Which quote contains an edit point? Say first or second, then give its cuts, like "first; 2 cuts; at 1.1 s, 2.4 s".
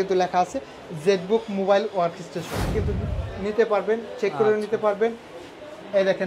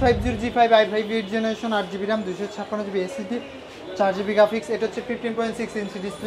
first; 1 cut; at 2.7 s